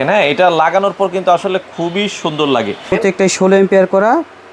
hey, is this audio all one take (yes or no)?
no